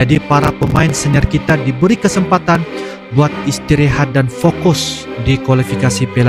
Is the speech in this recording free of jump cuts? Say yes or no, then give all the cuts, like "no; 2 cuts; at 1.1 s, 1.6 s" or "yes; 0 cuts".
yes; 0 cuts